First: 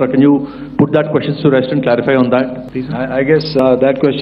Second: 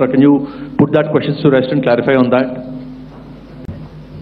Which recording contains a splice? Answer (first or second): first